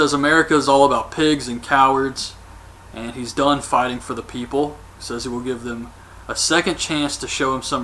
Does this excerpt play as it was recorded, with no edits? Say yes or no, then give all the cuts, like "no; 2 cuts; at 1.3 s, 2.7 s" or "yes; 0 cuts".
no; 1 cut; at 1.0 s